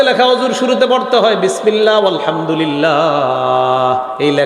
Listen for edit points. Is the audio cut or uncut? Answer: uncut